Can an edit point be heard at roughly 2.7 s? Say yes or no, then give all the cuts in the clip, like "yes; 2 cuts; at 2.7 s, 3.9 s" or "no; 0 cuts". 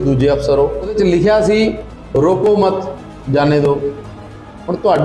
no; 1 cut; at 0.9 s